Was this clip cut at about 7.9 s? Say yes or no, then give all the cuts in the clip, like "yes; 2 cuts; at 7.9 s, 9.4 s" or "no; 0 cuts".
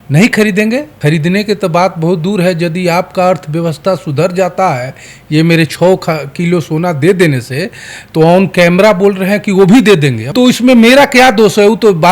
no; 2 cuts; at 0.9 s, 10.2 s